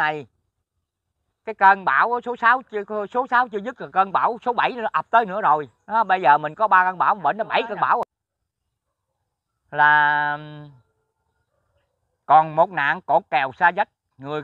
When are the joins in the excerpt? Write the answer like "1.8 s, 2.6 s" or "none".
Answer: 8.1 s